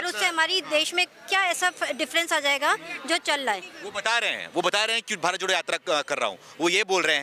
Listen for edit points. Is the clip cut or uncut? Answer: uncut